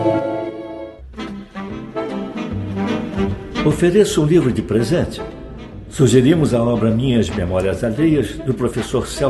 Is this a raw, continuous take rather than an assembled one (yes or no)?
no